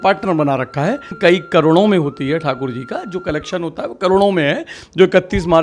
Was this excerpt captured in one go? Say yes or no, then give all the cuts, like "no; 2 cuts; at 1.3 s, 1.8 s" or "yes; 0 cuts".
no; 1 cut; at 1.1 s